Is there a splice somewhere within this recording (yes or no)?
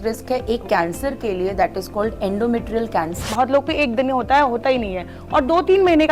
yes